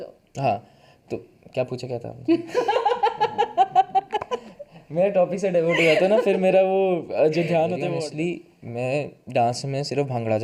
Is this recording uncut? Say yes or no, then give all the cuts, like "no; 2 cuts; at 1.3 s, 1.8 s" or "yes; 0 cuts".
no; 1 cut; at 7.9 s